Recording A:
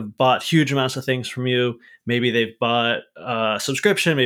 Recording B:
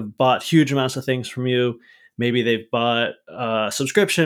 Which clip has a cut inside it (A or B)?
A